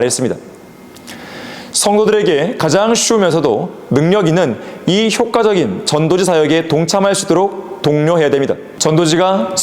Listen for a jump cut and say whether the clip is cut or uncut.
cut